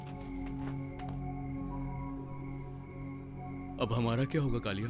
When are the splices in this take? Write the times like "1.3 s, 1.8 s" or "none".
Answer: none